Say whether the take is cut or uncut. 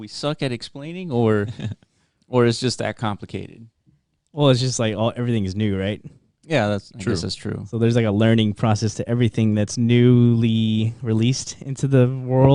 uncut